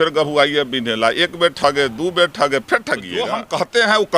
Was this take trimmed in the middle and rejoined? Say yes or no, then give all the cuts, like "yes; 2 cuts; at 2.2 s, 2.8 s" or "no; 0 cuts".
yes; 1 cut; at 3.2 s